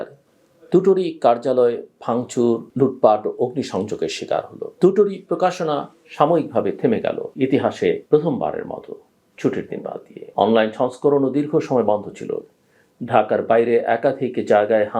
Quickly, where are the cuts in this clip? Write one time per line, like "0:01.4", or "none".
0:04.6
0:07.3
0:08.0
0:10.2

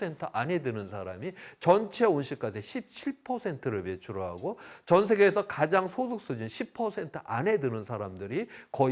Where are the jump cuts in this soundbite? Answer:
none

